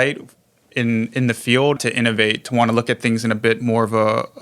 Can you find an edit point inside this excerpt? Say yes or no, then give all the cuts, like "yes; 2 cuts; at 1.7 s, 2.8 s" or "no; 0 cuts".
yes; 1 cut; at 1.8 s